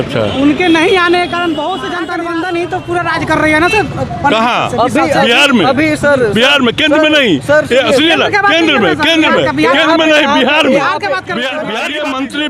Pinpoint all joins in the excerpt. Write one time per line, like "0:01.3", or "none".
0:02.0
0:11.6